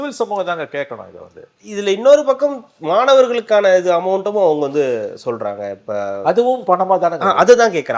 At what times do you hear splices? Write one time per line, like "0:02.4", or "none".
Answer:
none